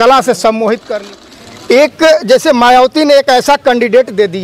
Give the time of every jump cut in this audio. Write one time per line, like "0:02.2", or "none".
0:00.9